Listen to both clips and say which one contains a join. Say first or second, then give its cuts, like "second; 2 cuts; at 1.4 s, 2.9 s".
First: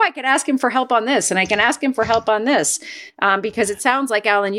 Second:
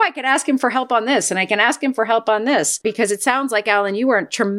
second; 1 cut; at 2.8 s